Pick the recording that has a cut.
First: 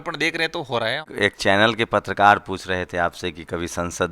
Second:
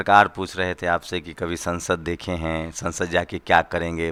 first; 1 cut; at 1.0 s

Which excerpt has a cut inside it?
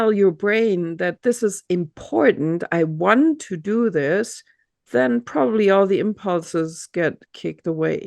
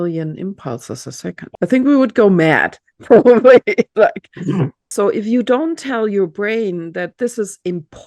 second; 2 cuts; at 1.4 s, 4.8 s

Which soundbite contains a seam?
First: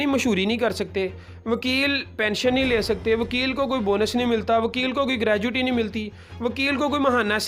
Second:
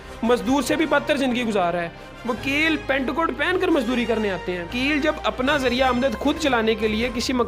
second; 1 cut; at 4.7 s

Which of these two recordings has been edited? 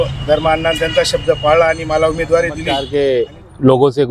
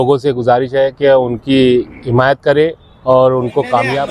first; 1 cut; at 2.8 s

